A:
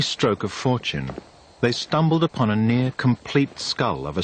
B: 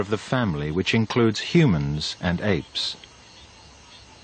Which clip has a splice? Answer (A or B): B